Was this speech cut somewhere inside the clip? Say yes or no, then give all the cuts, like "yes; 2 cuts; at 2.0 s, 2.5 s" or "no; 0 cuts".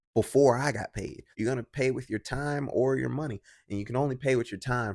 yes; 1 cut; at 1.2 s